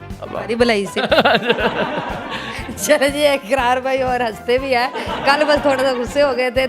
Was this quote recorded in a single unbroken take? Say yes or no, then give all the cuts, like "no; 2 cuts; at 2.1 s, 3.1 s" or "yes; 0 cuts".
yes; 0 cuts